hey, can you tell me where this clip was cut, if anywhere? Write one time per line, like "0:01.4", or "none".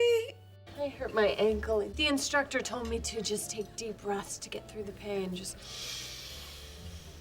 0:01.9